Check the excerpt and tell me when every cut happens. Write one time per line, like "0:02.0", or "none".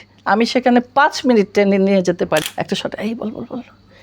0:02.4

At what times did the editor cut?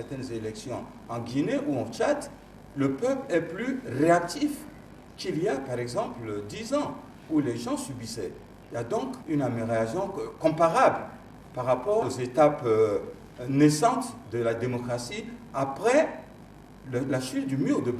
0:09.2
0:12.0

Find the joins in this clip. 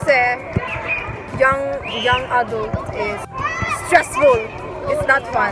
none

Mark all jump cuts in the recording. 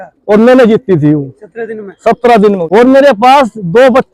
0:02.6

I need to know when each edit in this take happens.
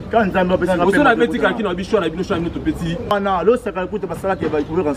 0:03.1

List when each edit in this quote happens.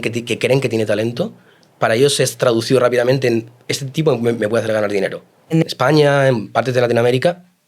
0:05.4

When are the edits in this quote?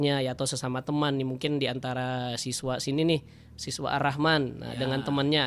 none

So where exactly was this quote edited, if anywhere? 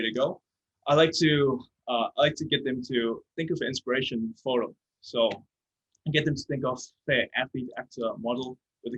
none

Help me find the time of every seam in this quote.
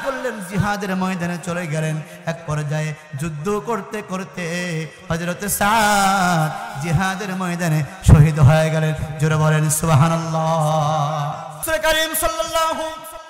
0:11.5

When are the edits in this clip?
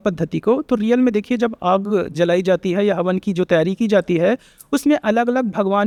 none

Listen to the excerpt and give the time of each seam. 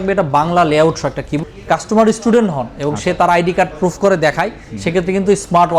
0:01.3

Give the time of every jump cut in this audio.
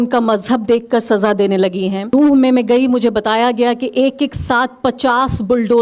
0:02.1

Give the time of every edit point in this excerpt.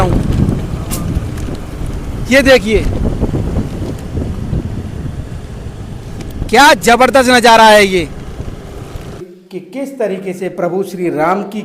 0:09.3

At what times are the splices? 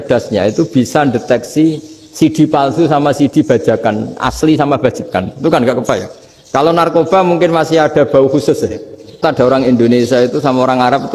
0:09.2

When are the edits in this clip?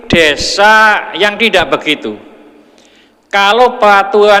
none

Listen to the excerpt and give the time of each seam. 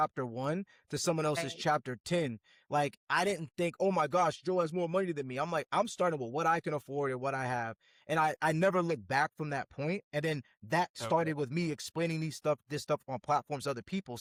none

